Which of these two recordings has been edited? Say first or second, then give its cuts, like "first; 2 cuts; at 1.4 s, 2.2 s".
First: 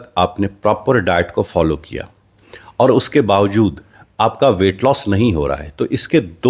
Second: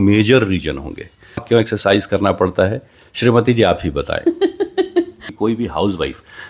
second; 2 cuts; at 1.4 s, 5.3 s